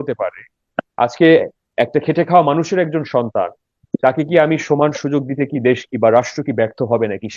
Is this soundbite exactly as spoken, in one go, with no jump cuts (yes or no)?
yes